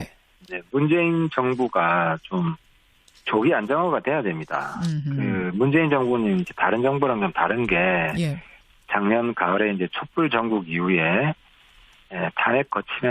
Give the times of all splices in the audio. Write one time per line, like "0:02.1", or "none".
none